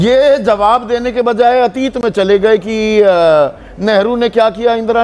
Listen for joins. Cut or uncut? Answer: uncut